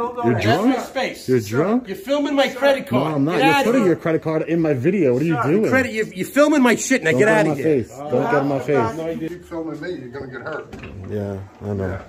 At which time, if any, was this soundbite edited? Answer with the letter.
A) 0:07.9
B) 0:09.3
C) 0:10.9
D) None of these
B